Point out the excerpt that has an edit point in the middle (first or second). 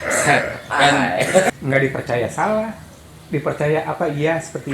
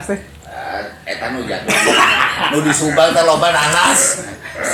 first